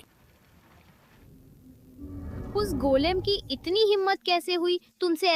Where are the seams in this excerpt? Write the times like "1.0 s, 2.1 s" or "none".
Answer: 1.2 s